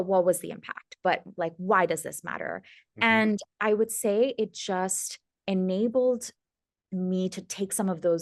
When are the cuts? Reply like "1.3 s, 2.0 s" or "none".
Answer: none

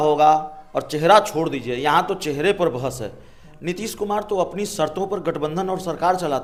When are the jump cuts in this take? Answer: none

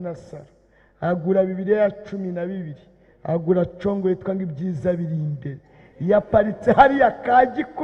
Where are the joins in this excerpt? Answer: none

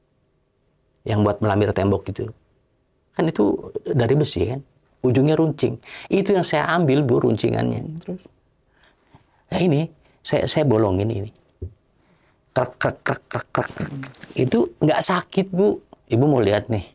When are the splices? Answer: 15.9 s

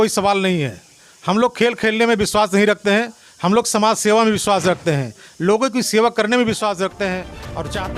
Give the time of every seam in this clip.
none

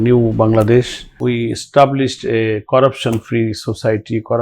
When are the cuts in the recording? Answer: 1.0 s

